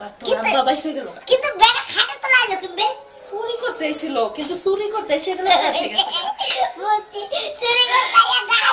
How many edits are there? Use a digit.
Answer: 1